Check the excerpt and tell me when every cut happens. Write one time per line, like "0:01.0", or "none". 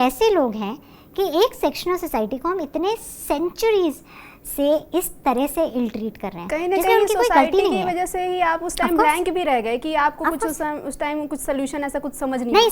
none